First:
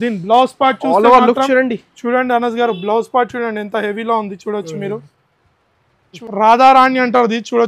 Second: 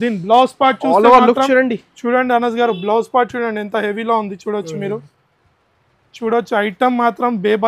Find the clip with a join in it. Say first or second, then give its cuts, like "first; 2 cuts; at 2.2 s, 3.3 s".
first; 1 cut; at 6.2 s